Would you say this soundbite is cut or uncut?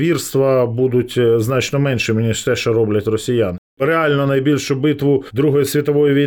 cut